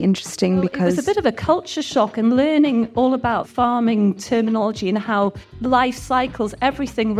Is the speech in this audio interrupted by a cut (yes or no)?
yes